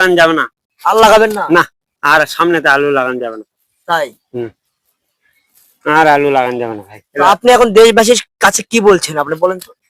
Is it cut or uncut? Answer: uncut